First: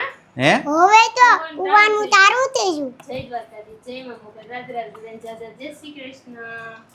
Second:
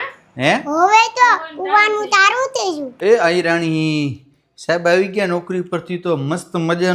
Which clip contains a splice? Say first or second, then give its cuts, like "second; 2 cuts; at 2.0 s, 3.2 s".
second; 1 cut; at 2.9 s